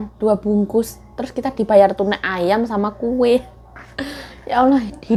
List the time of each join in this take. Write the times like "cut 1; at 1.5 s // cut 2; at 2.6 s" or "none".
none